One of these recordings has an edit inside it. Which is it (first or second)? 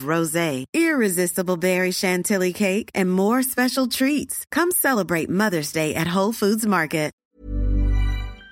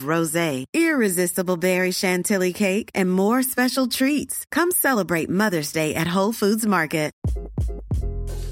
first